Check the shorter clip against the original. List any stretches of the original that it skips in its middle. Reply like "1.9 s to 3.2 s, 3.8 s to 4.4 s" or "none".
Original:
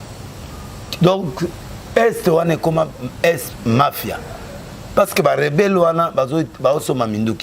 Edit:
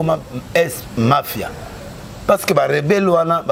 none